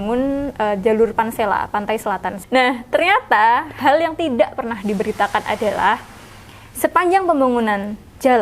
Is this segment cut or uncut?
cut